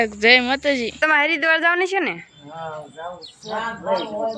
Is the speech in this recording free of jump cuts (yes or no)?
no